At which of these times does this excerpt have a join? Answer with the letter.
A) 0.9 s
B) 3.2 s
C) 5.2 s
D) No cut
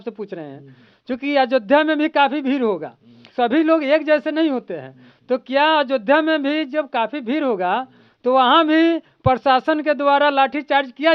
B